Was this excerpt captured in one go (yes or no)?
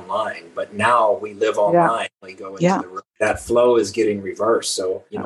no